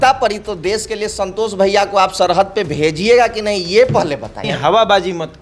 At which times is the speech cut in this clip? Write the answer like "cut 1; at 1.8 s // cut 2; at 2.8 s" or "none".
cut 1; at 4.4 s